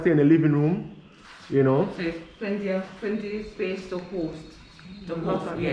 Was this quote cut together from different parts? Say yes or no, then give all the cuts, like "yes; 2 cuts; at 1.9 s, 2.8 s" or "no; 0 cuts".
no; 0 cuts